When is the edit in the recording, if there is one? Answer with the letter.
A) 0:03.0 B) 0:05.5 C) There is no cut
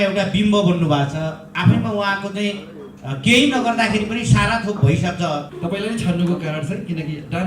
B